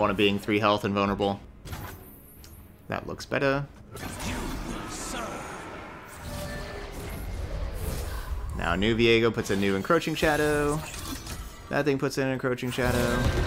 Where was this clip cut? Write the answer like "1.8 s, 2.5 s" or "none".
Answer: 1.5 s, 3.8 s